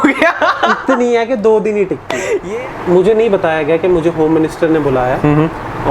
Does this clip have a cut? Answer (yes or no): yes